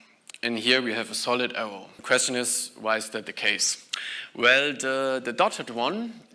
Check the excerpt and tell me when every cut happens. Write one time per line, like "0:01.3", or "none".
0:01.9